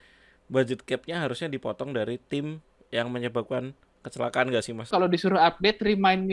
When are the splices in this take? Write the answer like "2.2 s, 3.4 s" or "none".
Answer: 4.9 s